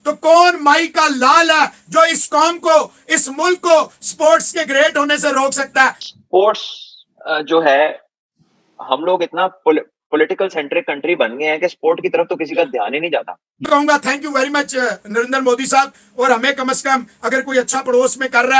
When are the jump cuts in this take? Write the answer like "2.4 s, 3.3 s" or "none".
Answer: 6.1 s, 13.6 s